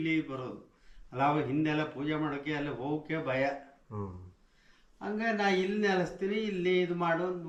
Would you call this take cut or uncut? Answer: uncut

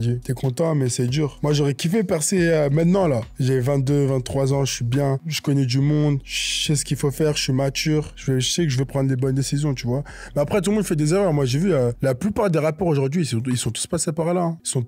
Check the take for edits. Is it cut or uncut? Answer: uncut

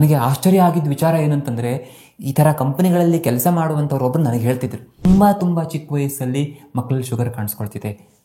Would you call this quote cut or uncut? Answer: cut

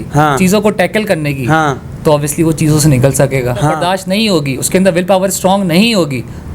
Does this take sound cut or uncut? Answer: cut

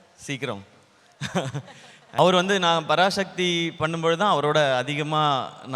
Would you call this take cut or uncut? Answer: cut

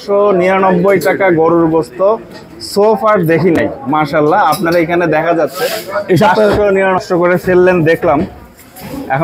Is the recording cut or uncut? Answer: cut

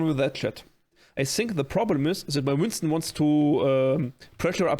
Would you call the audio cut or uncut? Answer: cut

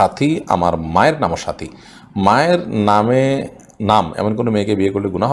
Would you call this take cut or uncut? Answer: uncut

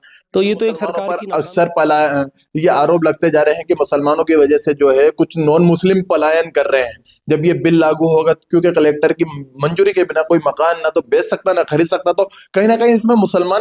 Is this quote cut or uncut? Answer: cut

